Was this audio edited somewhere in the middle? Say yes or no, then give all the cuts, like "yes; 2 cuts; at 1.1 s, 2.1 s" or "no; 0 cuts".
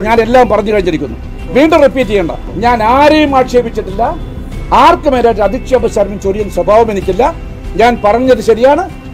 yes; 1 cut; at 2.4 s